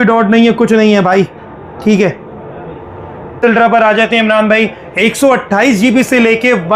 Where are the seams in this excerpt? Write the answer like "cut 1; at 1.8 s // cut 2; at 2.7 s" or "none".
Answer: cut 1; at 3.4 s